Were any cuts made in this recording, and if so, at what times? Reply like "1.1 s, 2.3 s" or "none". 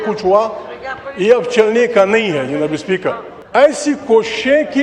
3.3 s